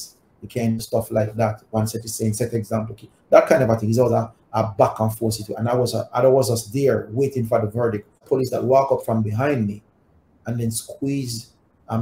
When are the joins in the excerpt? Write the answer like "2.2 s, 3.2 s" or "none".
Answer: 8.1 s